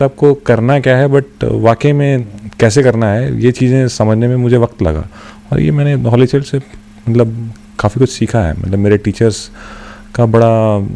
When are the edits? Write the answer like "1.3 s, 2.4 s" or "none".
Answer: none